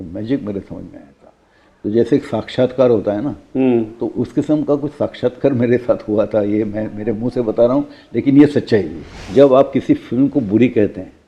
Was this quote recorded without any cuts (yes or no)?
no